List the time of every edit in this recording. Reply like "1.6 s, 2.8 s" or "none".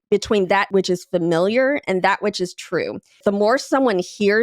3.2 s